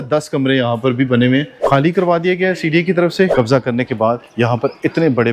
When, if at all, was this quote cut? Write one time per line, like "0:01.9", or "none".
0:01.6
0:03.3

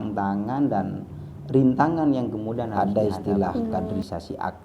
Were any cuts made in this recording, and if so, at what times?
0:02.7

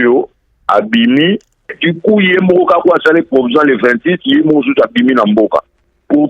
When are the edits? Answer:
0:01.7

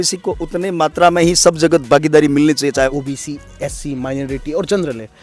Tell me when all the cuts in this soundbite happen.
0:02.9

